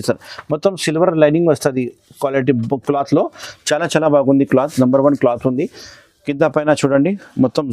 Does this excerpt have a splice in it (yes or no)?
no